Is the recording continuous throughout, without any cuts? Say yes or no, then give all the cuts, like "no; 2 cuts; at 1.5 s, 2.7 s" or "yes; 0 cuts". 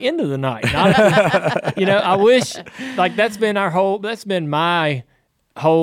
yes; 0 cuts